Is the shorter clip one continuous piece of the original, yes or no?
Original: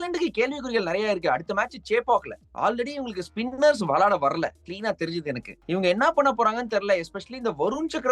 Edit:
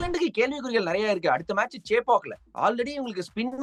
yes